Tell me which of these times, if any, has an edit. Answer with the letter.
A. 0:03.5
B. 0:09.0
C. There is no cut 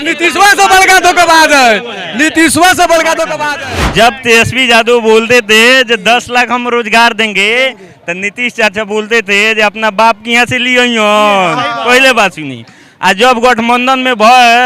A